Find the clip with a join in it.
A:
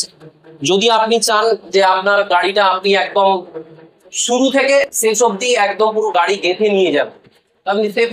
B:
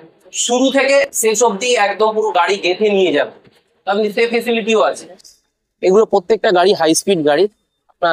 B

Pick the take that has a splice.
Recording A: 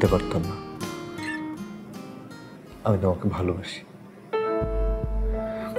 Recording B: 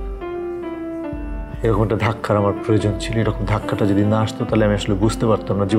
A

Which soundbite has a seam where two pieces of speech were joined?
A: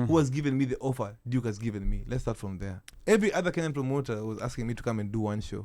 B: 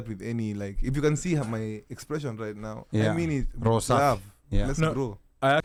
A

